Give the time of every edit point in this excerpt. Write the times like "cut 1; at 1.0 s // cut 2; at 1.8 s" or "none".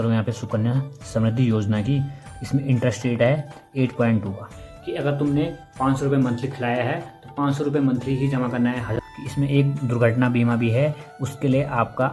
cut 1; at 4.7 s // cut 2; at 8.9 s